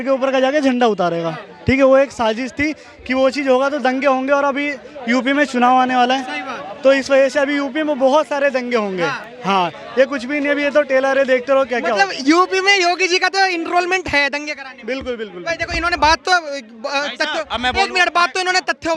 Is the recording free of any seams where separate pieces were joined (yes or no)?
yes